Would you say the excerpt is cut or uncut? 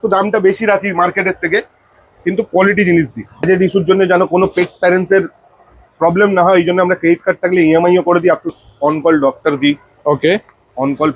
cut